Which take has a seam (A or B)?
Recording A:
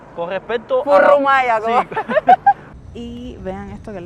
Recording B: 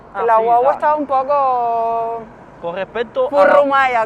A